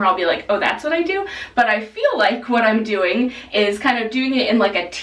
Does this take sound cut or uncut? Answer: uncut